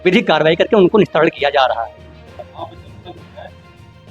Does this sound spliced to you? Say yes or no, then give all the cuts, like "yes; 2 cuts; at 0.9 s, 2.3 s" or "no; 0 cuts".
yes; 1 cut; at 2.3 s